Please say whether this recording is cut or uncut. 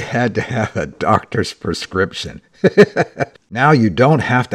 cut